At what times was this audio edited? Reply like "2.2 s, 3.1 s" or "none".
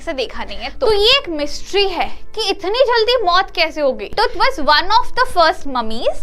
0.9 s, 4.1 s